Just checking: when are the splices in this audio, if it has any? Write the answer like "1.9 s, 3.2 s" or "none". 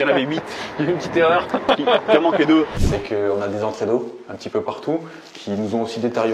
2.8 s